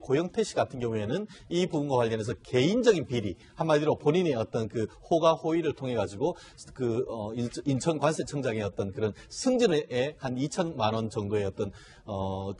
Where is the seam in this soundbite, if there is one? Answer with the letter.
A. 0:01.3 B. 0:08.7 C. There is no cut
B